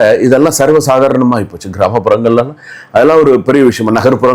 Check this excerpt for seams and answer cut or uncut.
uncut